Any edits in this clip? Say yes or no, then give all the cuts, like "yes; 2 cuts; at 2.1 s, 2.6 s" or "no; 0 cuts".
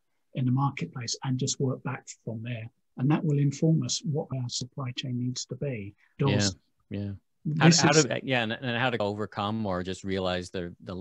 yes; 3 cuts; at 4.3 s, 6.1 s, 9.0 s